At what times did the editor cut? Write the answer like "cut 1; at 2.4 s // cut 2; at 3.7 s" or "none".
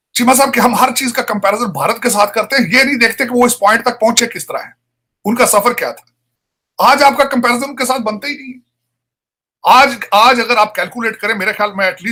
none